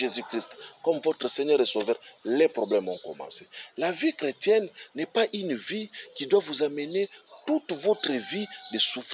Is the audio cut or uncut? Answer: uncut